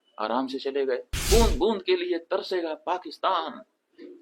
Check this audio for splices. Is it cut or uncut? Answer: cut